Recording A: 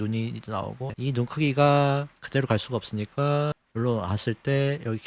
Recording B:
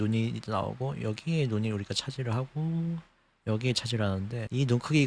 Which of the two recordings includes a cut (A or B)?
A